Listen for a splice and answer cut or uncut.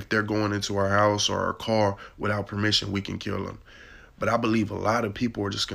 uncut